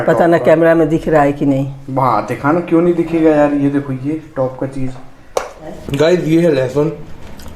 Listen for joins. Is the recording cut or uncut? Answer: cut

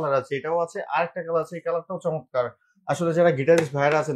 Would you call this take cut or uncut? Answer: uncut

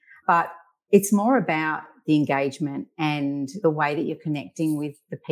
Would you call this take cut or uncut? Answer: cut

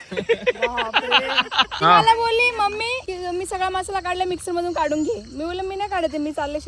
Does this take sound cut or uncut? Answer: cut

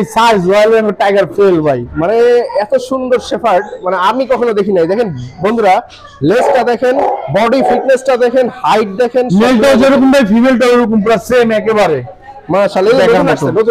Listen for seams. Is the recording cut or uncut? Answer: uncut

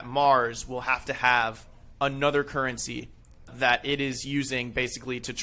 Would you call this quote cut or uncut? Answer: cut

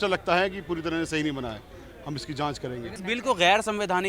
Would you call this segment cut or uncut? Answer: cut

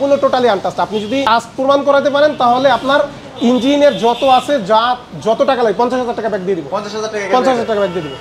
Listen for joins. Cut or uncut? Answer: cut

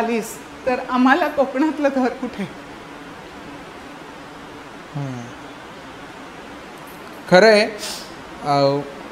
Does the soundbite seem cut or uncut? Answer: uncut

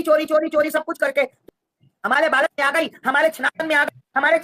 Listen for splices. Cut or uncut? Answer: cut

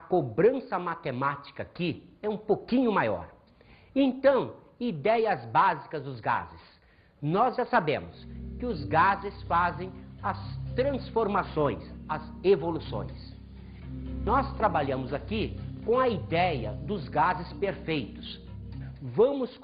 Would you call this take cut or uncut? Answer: cut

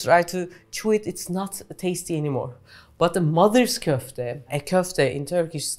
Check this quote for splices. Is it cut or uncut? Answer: uncut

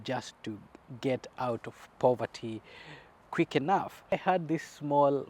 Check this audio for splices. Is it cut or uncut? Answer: cut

